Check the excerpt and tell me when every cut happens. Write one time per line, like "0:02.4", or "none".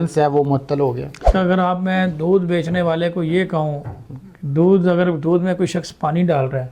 0:01.3